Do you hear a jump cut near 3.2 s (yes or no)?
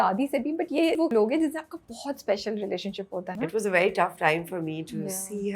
yes